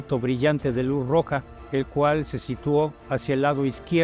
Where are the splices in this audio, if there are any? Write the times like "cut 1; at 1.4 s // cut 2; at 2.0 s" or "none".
cut 1; at 1.6 s // cut 2; at 2.8 s